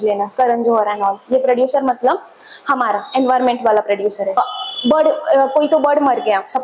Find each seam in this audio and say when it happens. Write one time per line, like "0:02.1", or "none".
0:04.4